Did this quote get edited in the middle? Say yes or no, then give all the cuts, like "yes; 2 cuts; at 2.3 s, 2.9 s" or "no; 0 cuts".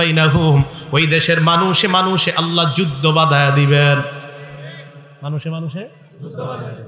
no; 0 cuts